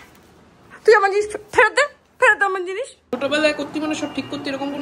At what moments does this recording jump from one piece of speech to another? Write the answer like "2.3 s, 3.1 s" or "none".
3.0 s